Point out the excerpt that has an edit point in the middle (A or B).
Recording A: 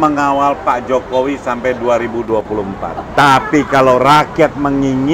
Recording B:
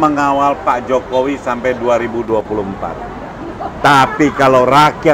A